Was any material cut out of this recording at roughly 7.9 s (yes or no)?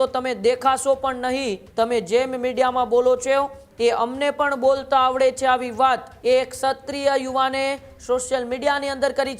no